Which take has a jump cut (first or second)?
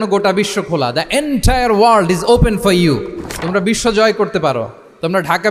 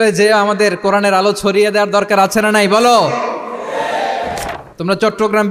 second